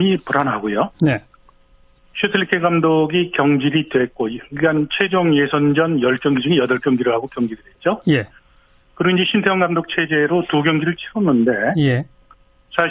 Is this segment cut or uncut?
uncut